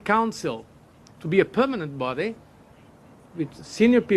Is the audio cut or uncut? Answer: cut